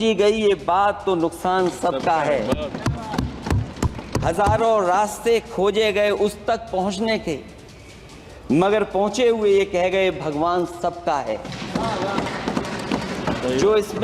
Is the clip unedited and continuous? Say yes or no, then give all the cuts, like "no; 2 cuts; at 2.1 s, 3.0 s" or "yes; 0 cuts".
yes; 0 cuts